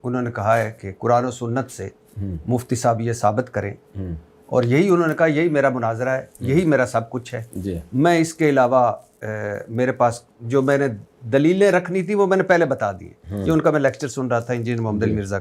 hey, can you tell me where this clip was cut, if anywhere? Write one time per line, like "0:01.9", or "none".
none